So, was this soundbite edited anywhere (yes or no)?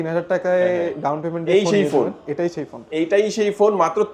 no